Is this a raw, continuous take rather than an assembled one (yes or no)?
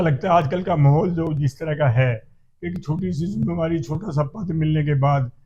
yes